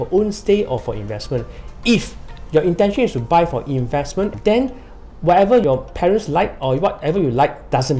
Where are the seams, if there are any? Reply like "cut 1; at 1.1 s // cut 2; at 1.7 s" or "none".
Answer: cut 1; at 4.3 s // cut 2; at 5.6 s